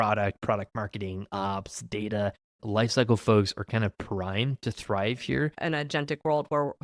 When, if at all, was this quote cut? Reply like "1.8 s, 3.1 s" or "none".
2.6 s, 5.6 s